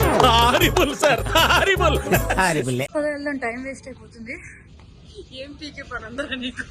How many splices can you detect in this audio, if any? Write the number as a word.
one